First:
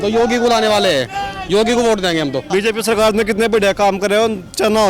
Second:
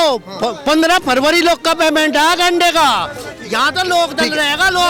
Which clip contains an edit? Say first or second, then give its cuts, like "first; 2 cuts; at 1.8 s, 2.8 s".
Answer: first; 1 cut; at 2.5 s